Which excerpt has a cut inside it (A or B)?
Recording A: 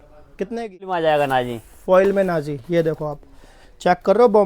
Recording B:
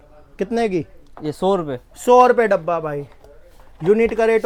A